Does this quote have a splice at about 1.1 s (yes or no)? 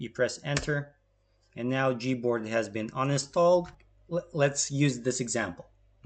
no